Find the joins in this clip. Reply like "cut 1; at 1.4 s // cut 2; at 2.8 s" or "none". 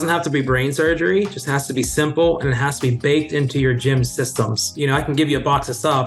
cut 1; at 4.7 s

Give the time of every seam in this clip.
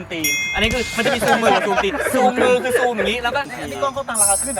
cut 1; at 3.5 s

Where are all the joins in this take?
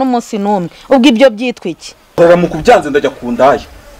cut 1; at 2.2 s

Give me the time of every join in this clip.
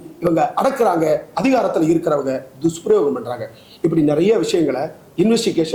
none

